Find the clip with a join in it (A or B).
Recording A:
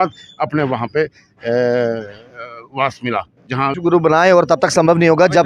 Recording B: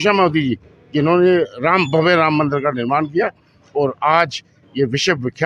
A